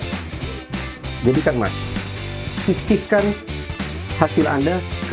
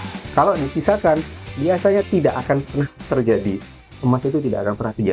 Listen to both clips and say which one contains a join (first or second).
first